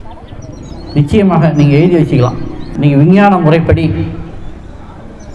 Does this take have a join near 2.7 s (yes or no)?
yes